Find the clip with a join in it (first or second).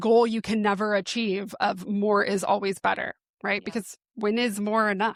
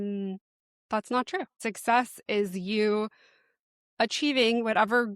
second